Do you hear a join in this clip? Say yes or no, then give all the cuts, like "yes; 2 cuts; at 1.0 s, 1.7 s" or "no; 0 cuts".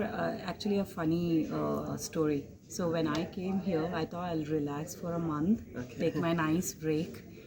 no; 0 cuts